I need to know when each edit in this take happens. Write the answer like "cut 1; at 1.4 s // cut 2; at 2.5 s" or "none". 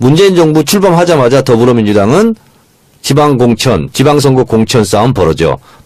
cut 1; at 4.2 s